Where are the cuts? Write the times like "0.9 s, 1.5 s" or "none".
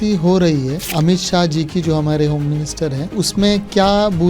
0.9 s, 3.2 s